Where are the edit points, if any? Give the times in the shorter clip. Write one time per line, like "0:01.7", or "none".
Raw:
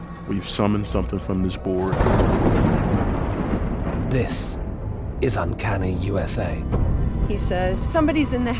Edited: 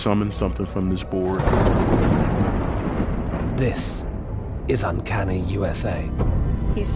none